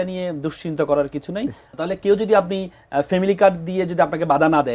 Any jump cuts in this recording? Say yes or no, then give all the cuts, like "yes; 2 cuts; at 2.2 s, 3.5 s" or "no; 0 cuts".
yes; 1 cut; at 1.7 s